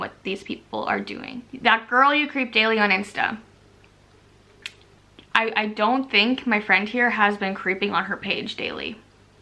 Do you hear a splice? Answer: no; 0 cuts

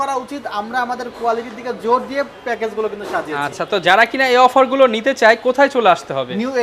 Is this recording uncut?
yes; 0 cuts

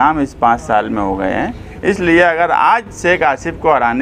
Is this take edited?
no; 0 cuts

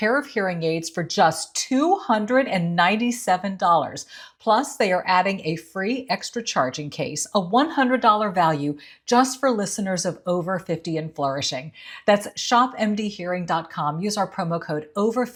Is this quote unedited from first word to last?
yes; 0 cuts

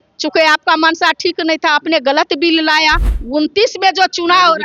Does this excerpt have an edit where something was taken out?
yes; 1 cut; at 3.1 s

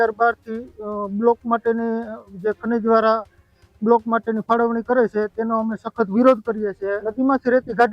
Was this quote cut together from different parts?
yes; 1 cut; at 7.0 s

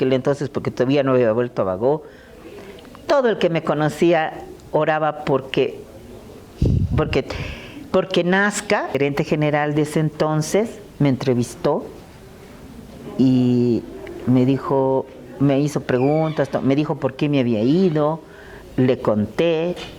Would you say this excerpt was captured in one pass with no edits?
no; 1 cut; at 8.9 s

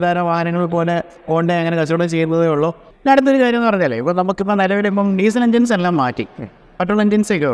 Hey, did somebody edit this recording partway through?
yes; 1 cut; at 2.9 s

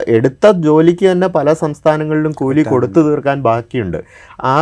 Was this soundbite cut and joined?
no; 0 cuts

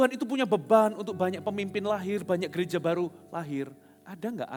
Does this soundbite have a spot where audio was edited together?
no; 0 cuts

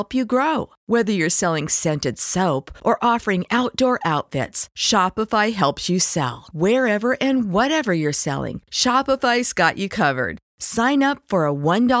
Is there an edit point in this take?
no; 0 cuts

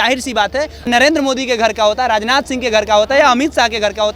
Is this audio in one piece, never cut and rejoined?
no; 1 cut; at 1.1 s

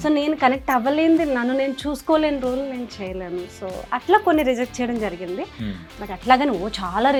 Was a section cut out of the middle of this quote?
no; 0 cuts

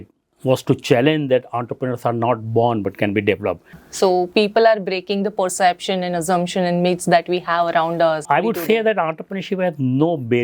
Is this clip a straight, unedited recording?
no; 2 cuts; at 3.8 s, 8.2 s

